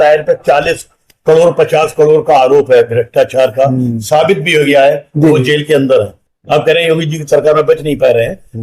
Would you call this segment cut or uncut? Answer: uncut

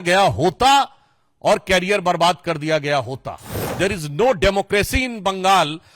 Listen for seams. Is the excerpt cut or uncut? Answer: cut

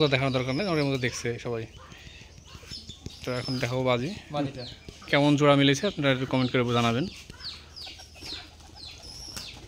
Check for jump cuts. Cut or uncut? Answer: uncut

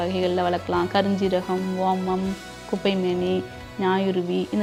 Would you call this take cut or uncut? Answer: uncut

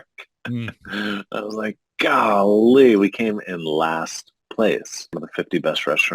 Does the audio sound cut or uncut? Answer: cut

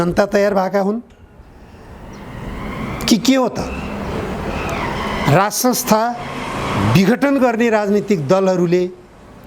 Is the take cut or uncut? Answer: uncut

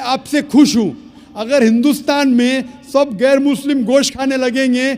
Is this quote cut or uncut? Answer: uncut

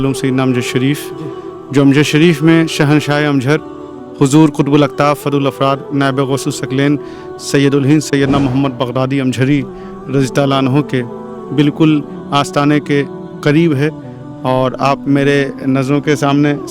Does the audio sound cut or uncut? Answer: uncut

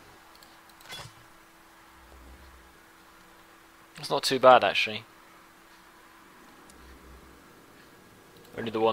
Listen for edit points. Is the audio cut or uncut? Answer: uncut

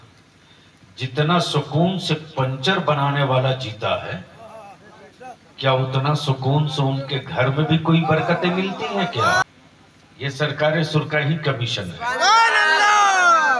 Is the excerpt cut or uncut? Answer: cut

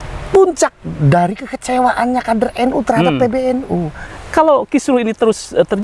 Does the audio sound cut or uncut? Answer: cut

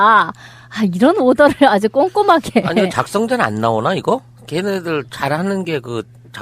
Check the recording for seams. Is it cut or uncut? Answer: uncut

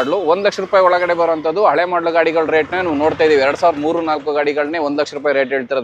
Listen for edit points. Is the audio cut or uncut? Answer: uncut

